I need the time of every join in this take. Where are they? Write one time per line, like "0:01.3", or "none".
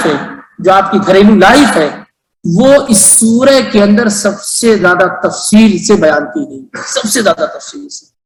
none